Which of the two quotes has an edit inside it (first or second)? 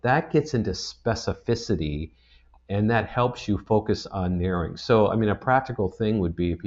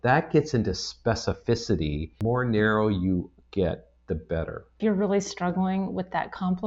second